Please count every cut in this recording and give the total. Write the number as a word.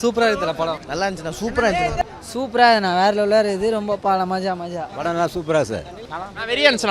two